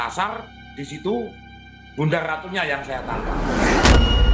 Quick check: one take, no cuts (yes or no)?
no